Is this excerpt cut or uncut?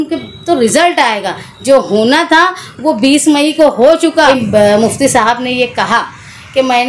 cut